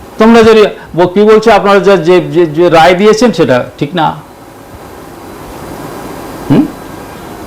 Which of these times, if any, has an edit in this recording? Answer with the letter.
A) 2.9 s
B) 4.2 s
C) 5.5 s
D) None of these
D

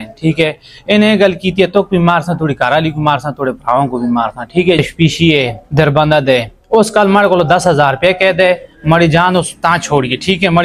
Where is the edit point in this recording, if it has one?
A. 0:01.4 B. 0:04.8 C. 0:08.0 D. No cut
B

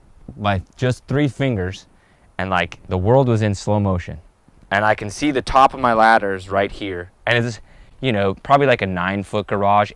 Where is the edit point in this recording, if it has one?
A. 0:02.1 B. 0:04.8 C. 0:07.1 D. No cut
D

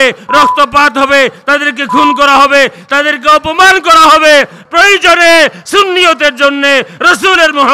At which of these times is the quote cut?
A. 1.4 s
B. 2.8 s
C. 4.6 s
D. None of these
C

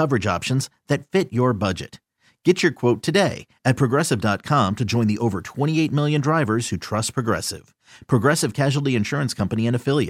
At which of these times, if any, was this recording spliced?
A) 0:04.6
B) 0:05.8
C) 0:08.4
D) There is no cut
D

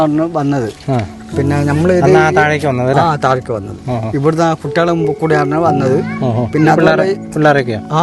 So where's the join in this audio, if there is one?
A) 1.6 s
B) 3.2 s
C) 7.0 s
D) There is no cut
D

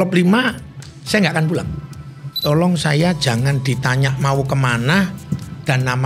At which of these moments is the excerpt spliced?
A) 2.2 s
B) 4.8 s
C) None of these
A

